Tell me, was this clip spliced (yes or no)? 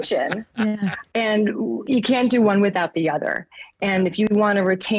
no